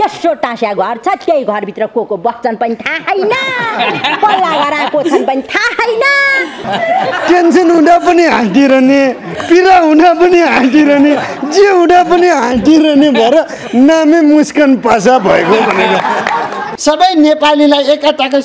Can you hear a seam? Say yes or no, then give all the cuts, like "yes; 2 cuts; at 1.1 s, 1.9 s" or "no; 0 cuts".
yes; 2 cuts; at 6.6 s, 16.6 s